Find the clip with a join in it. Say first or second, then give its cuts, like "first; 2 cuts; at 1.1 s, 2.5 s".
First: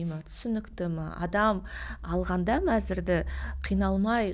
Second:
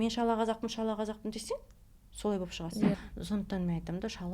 second; 1 cut; at 3.0 s